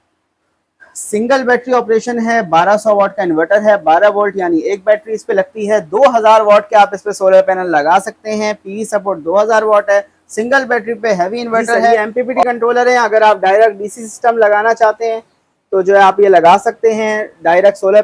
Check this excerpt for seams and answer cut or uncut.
cut